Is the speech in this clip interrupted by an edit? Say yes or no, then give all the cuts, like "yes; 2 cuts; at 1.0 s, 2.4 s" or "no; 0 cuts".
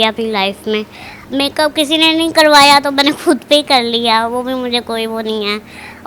no; 0 cuts